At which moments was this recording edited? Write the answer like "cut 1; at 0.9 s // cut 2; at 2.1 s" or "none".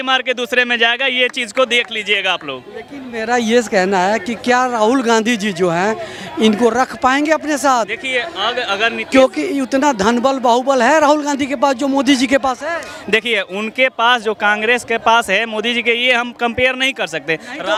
none